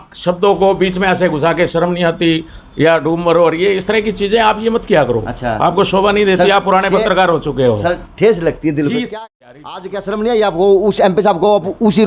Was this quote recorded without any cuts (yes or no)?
no